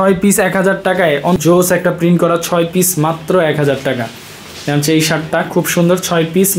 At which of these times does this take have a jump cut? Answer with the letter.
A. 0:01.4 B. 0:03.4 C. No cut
A